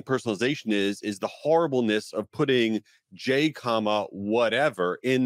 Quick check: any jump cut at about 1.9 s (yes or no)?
no